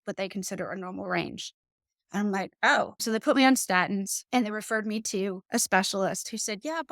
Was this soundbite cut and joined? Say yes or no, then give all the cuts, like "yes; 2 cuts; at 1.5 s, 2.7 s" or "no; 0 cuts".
yes; 3 cuts; at 3.0 s, 4.2 s, 5.4 s